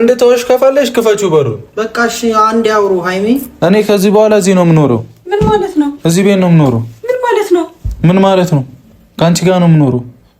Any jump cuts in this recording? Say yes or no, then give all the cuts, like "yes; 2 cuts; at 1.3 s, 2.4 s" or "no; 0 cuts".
yes; 1 cut; at 3.5 s